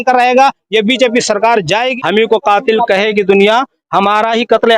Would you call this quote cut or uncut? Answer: cut